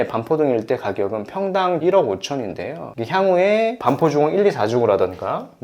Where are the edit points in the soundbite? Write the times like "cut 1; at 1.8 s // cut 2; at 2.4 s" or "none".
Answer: cut 1; at 1.8 s

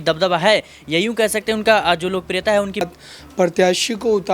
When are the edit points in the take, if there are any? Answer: cut 1; at 2.8 s

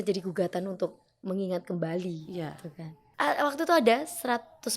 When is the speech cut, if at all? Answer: cut 1; at 3.0 s

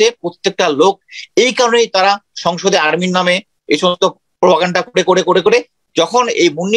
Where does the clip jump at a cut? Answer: none

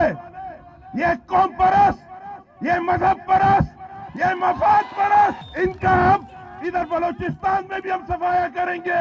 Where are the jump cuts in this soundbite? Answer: cut 1; at 5.4 s

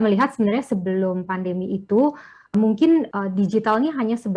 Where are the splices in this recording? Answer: cut 1; at 2.5 s // cut 2; at 3.1 s

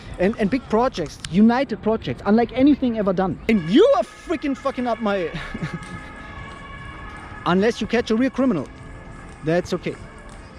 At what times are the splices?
cut 1; at 3.4 s

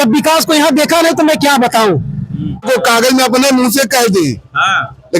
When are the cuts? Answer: cut 1; at 2.6 s

